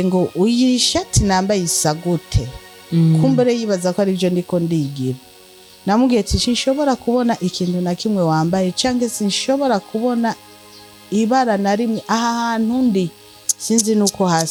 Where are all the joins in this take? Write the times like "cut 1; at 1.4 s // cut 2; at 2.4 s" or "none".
none